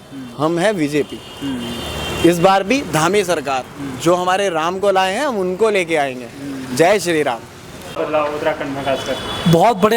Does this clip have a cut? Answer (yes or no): yes